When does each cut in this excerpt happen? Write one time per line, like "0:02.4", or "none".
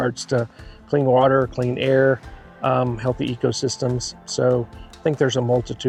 none